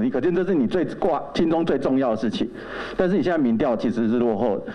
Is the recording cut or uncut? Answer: uncut